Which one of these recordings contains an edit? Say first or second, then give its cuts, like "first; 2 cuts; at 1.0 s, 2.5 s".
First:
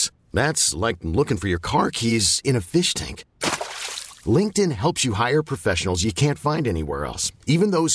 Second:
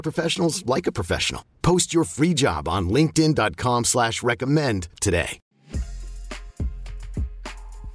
second; 1 cut; at 5.5 s